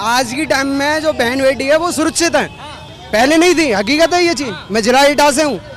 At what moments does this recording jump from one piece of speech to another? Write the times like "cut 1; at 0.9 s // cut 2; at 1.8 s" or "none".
none